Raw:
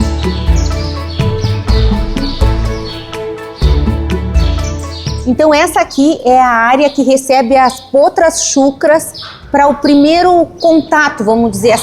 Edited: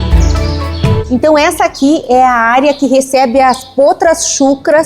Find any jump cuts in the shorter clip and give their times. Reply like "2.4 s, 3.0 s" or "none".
1.0 s